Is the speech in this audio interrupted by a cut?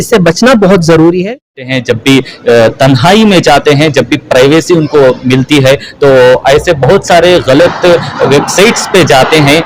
yes; 1 cut; at 1.6 s

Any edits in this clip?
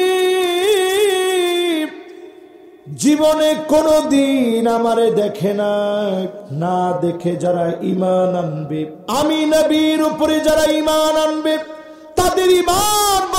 yes; 2 cuts; at 6.4 s, 9.0 s

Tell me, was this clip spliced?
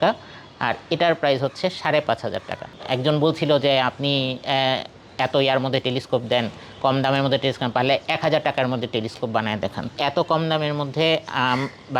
yes; 2 cuts; at 2.8 s, 9.9 s

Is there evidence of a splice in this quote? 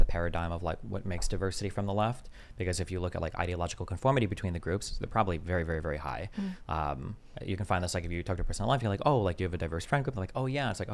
no; 0 cuts

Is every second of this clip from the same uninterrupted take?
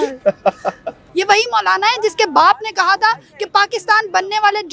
no; 1 cut; at 1.0 s

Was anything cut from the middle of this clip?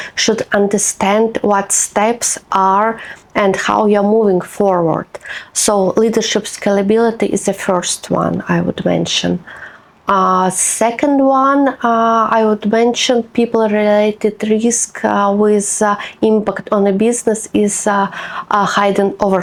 no; 0 cuts

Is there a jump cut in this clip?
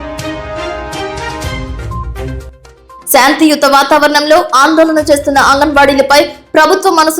yes; 1 cut; at 2.1 s

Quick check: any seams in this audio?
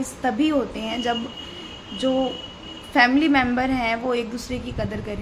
no; 0 cuts

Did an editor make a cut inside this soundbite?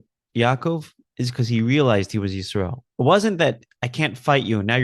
yes; 1 cut; at 2.8 s

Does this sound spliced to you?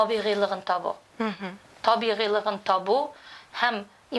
no; 0 cuts

